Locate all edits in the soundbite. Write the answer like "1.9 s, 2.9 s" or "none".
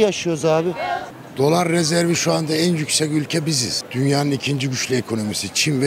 1.0 s, 3.8 s